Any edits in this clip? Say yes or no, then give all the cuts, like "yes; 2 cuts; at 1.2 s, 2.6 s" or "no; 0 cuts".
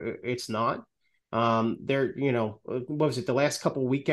no; 0 cuts